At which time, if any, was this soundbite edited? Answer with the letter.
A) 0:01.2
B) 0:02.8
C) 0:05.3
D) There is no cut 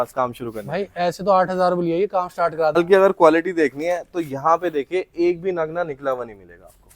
B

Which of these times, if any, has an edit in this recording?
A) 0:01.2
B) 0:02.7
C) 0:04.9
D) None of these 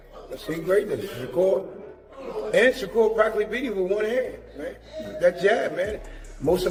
D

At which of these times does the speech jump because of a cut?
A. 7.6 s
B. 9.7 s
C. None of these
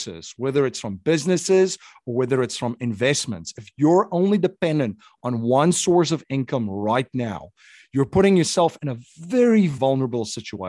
B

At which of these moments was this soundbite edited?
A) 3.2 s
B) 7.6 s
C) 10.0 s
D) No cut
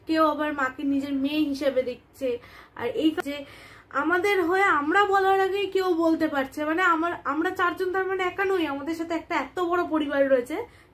A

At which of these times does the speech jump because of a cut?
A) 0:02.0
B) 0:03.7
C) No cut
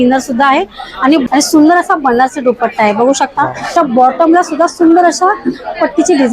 B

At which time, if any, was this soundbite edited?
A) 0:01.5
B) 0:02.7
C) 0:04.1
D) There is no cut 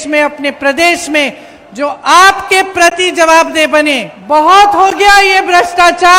C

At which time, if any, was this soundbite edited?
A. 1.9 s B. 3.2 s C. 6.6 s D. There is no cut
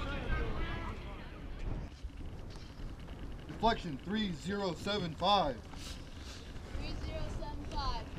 A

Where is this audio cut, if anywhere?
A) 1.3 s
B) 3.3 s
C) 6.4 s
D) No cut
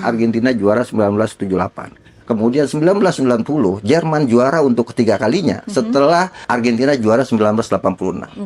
C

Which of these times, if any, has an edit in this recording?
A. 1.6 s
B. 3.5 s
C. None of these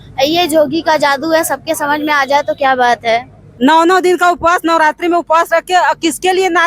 B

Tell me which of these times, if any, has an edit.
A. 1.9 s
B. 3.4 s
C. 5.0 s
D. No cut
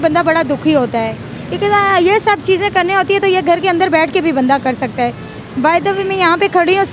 D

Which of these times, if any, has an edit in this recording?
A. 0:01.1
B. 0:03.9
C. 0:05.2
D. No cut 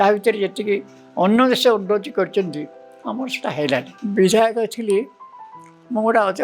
B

